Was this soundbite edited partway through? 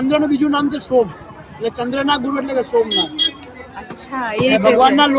no; 0 cuts

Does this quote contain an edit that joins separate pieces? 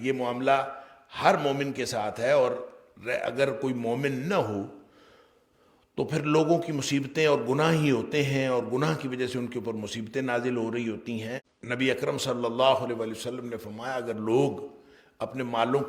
yes; 1 cut; at 11.4 s

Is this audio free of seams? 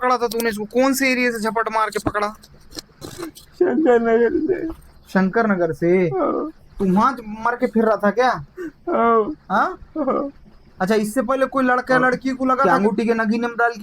no; 1 cut; at 12.6 s

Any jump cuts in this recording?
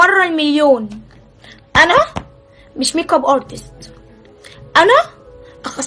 no; 0 cuts

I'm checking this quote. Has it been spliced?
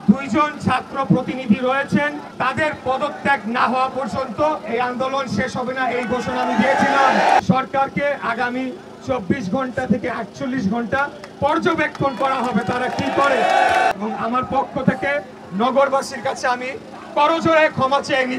yes; 3 cuts; at 2.2 s, 7.4 s, 13.9 s

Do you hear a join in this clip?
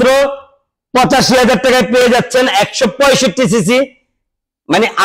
no; 0 cuts

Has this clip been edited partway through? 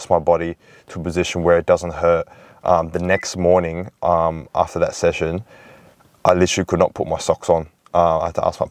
no; 0 cuts

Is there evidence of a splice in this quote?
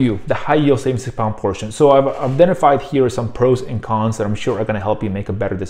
no; 0 cuts

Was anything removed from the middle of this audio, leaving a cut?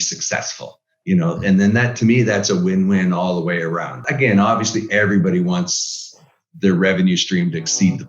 yes; 1 cut; at 4.0 s

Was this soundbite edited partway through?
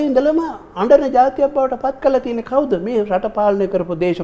no; 0 cuts

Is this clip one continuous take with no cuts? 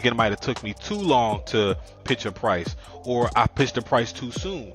no; 1 cut; at 2.0 s

